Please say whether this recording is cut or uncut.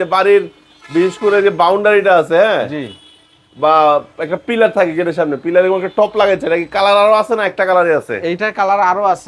uncut